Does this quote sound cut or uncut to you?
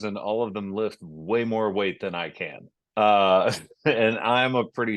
uncut